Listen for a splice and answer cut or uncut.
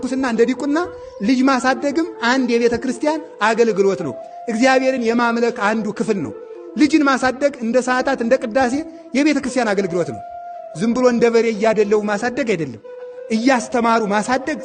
uncut